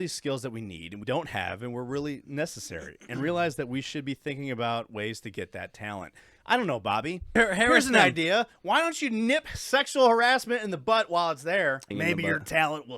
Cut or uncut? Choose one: cut